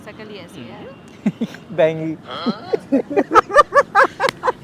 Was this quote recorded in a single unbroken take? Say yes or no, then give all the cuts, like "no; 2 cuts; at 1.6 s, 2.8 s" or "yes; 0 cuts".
no; 1 cut; at 2.9 s